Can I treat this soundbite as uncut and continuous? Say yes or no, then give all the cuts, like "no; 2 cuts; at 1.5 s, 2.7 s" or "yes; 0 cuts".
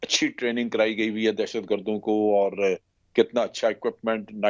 yes; 0 cuts